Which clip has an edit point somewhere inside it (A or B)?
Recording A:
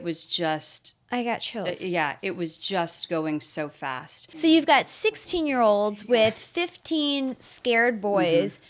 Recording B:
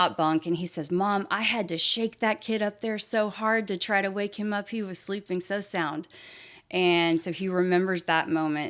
A